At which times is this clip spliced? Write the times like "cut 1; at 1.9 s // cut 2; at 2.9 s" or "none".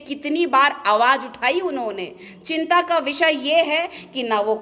none